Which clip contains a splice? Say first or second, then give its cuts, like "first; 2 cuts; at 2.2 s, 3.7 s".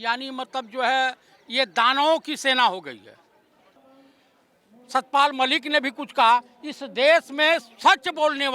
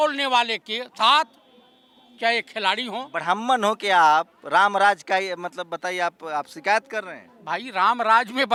first; 1 cut; at 3.8 s